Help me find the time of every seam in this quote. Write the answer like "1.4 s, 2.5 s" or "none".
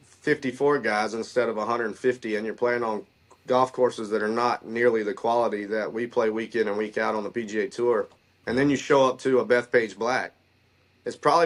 none